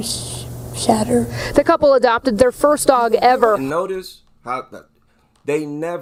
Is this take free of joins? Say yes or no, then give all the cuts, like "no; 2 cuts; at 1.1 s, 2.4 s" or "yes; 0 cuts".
yes; 0 cuts